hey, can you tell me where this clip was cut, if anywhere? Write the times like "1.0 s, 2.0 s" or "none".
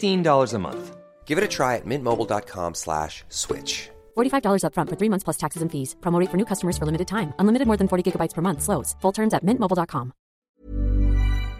10.5 s